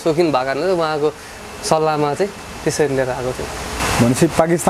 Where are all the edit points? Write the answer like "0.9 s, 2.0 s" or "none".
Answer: 3.8 s